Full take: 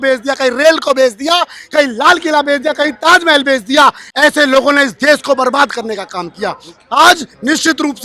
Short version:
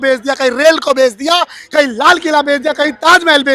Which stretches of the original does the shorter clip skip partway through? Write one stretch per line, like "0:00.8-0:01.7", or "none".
none